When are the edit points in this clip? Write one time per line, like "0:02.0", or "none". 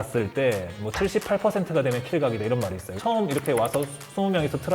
0:02.9